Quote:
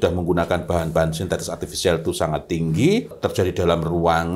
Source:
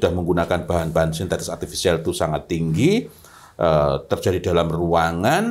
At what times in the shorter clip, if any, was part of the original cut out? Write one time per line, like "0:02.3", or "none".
0:03.1